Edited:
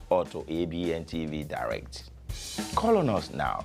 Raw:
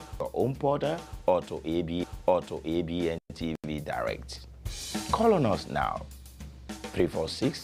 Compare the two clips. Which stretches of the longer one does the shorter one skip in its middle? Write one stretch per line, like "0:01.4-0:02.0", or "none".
0:02.2-0:03.4